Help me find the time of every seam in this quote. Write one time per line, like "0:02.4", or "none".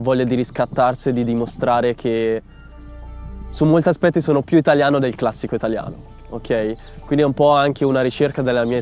none